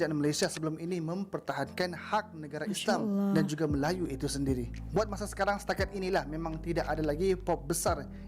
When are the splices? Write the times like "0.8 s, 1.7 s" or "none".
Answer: none